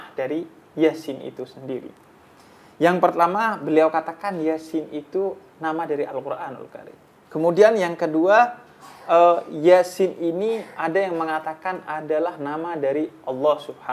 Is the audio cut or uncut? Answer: uncut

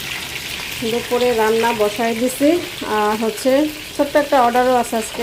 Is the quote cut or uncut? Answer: uncut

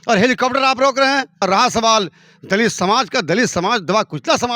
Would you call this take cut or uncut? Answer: cut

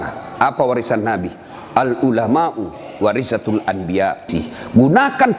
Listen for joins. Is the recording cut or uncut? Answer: cut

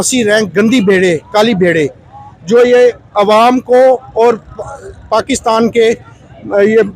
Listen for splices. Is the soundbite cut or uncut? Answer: uncut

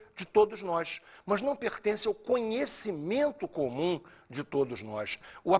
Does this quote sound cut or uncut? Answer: cut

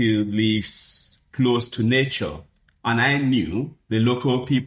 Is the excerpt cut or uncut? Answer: uncut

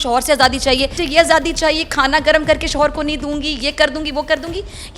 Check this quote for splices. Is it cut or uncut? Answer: cut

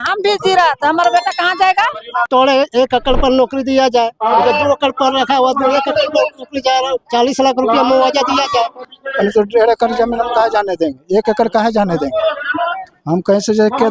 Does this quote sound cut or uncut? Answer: cut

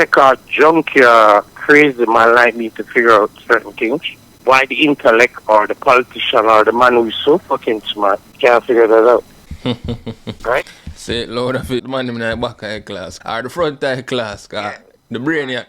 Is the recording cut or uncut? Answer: cut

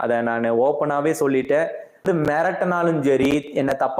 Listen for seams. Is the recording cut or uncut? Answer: cut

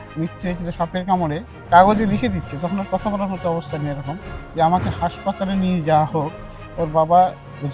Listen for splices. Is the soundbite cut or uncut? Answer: cut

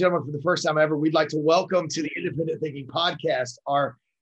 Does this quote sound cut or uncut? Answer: uncut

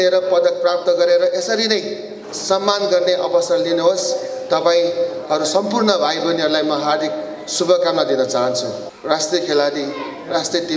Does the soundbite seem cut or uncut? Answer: cut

